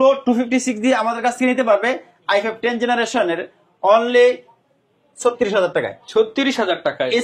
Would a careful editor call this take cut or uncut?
uncut